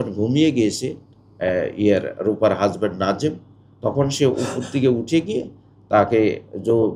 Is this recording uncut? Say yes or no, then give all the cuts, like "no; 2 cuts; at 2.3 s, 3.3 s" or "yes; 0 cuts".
yes; 0 cuts